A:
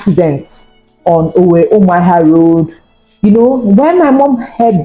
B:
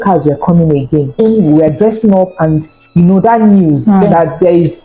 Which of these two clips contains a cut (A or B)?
B